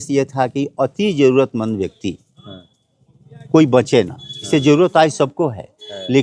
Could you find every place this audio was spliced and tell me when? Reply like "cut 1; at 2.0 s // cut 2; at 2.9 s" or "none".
none